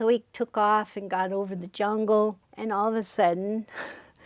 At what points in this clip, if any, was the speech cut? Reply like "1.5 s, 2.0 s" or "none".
2.5 s